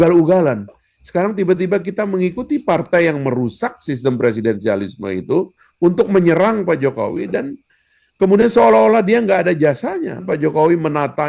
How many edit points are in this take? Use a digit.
1